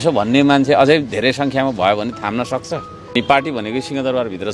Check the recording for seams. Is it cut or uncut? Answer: cut